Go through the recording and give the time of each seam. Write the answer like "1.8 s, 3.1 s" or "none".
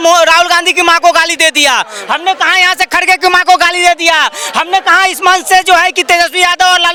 none